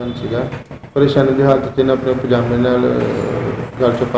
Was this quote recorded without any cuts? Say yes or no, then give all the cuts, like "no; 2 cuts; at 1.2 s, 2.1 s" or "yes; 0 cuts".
yes; 0 cuts